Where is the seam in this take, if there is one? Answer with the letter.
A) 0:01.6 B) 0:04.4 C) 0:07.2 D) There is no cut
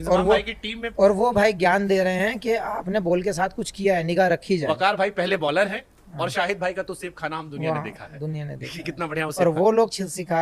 D